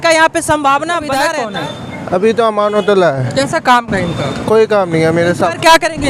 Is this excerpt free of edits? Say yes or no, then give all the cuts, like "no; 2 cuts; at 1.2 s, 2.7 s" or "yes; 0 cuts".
no; 1 cut; at 1.3 s